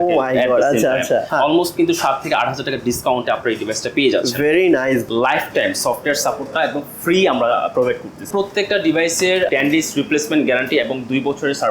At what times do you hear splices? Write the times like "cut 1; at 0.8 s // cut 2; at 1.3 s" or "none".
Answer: cut 1; at 1.3 s // cut 2; at 5.0 s // cut 3; at 8.3 s // cut 4; at 9.5 s